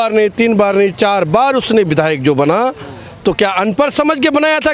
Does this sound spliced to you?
no; 0 cuts

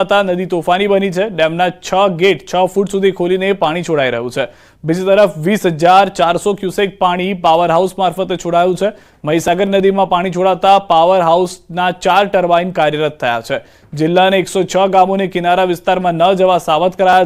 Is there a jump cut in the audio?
yes; 1 cut; at 8.4 s

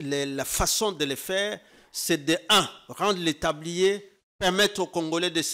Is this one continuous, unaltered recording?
yes; 0 cuts

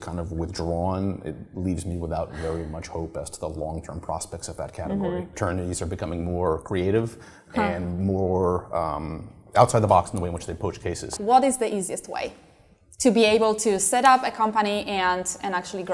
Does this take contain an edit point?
yes; 2 cuts; at 5.4 s, 11.1 s

